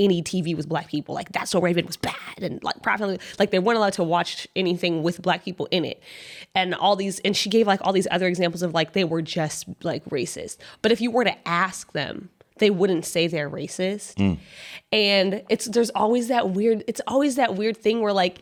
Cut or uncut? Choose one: uncut